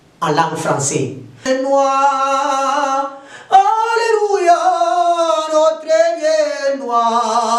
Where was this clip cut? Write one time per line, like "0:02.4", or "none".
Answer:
0:01.5